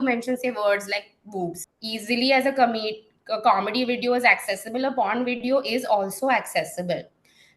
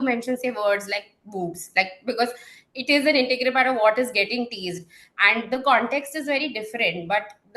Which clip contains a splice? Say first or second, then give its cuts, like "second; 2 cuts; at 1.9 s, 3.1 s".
first; 1 cut; at 1.6 s